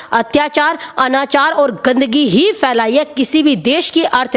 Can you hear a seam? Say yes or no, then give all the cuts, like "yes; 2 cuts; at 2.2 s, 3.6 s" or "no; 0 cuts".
no; 0 cuts